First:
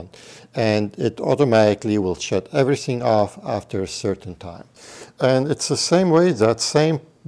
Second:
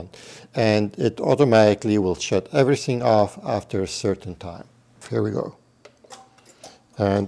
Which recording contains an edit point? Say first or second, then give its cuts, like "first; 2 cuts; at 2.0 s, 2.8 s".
second; 1 cut; at 5.0 s